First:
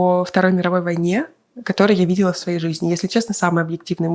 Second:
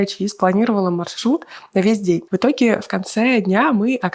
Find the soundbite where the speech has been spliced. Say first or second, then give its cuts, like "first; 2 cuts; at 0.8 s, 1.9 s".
second; 1 cut; at 2.3 s